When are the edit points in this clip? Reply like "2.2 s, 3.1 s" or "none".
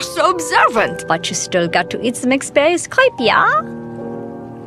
1.3 s